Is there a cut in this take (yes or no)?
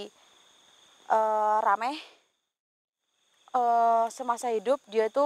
yes